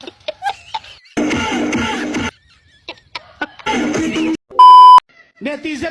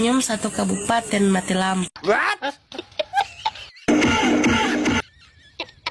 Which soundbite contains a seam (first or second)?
first